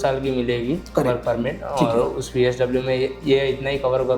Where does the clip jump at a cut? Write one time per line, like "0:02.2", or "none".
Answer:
none